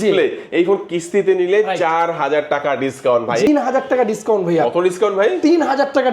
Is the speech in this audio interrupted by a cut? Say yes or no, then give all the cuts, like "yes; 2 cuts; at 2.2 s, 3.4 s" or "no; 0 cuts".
yes; 1 cut; at 3.5 s